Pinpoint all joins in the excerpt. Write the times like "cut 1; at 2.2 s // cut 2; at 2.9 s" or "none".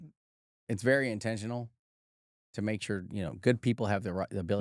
none

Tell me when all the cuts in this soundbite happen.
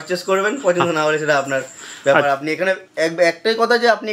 none

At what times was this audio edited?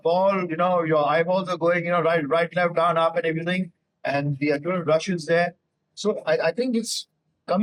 none

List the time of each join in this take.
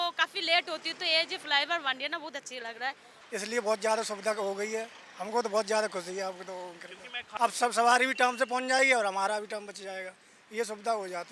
cut 1; at 3.1 s // cut 2; at 7.2 s

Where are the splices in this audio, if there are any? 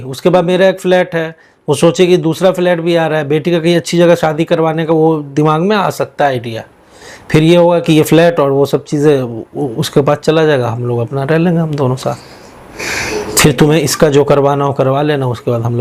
none

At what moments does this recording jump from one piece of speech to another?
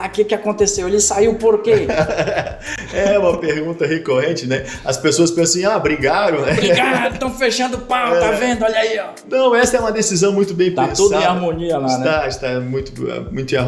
none

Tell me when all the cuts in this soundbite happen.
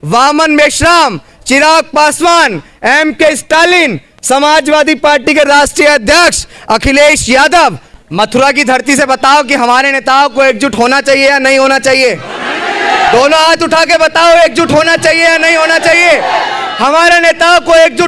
cut 1; at 7.9 s

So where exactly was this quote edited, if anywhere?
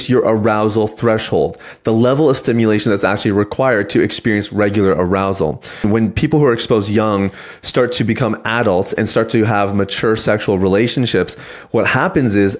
cut 1; at 5.8 s

